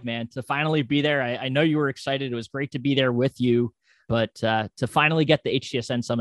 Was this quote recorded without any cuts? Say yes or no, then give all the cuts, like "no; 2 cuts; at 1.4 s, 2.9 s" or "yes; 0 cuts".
no; 1 cut; at 4.1 s